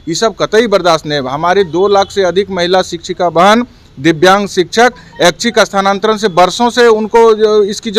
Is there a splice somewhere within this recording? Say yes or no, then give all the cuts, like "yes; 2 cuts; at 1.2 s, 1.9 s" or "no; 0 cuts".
no; 0 cuts